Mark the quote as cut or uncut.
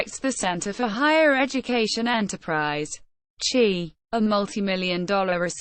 cut